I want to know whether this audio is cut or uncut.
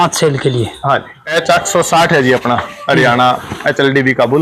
cut